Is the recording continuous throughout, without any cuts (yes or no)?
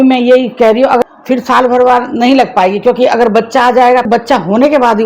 no